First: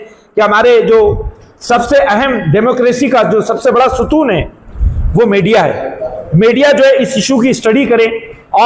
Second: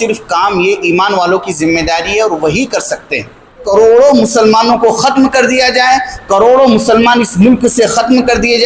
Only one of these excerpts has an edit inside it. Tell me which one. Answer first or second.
second